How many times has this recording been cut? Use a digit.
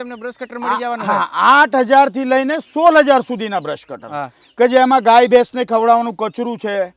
0